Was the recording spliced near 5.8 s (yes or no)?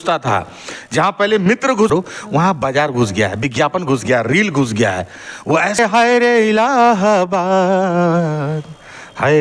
yes